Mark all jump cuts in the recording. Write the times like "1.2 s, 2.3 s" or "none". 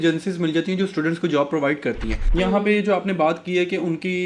2.2 s